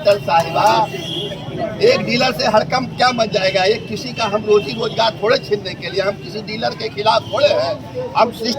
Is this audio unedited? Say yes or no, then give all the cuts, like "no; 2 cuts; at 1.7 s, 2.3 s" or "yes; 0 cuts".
yes; 0 cuts